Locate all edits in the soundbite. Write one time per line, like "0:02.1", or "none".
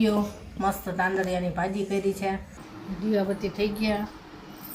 0:03.1